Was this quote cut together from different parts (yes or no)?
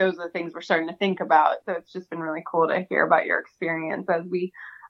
yes